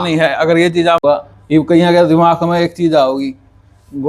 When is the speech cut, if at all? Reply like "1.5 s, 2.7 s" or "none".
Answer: 1.0 s